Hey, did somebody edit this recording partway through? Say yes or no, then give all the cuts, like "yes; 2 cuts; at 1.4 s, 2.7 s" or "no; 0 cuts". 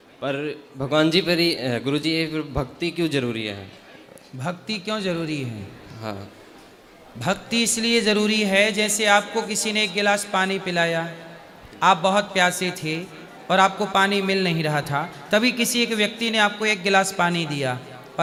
no; 0 cuts